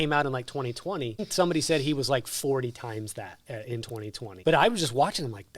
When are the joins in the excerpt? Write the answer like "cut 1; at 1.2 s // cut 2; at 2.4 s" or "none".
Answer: cut 1; at 1.3 s // cut 2; at 4.3 s